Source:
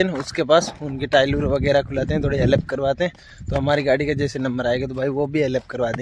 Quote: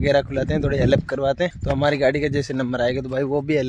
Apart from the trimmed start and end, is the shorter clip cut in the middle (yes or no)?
yes